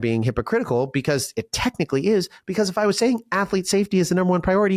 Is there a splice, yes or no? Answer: no